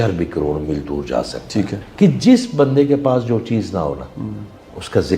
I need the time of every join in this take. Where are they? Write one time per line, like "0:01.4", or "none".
0:01.8